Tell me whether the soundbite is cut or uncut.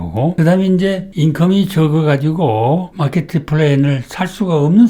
uncut